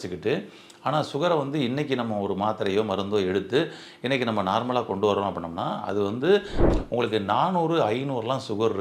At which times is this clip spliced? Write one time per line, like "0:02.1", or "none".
0:06.6